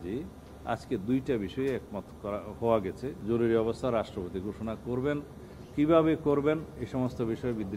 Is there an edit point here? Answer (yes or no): yes